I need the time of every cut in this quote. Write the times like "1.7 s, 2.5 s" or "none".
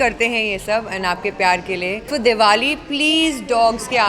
2.1 s